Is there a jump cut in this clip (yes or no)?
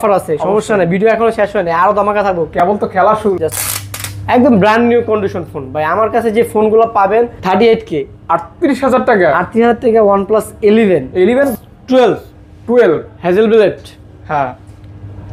yes